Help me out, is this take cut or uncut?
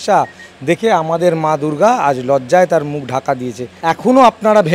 cut